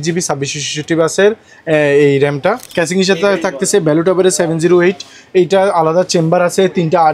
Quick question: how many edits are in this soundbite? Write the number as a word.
one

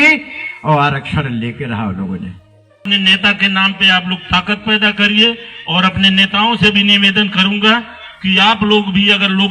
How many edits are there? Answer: one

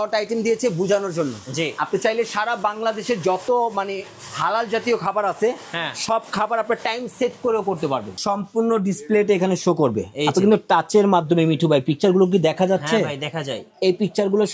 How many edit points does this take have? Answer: one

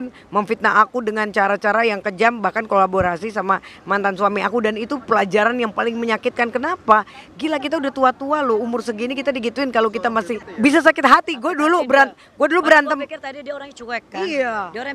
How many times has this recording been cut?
zero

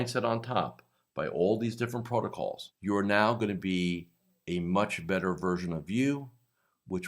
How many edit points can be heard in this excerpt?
one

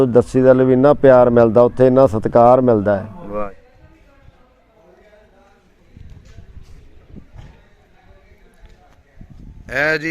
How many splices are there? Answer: one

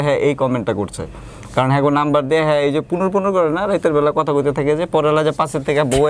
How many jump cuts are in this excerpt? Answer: zero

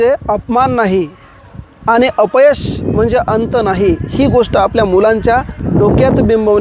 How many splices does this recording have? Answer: one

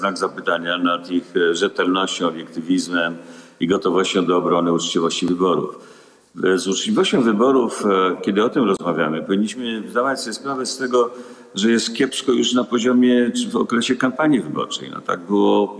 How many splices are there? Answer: zero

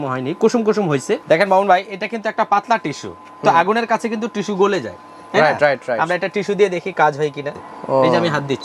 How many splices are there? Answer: two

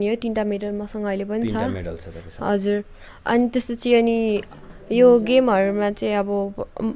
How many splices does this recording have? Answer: zero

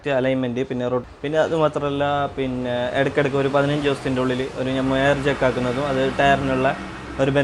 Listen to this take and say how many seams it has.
one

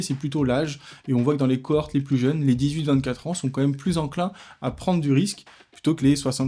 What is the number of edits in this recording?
zero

